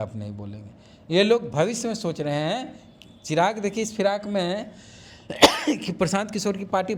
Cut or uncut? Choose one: uncut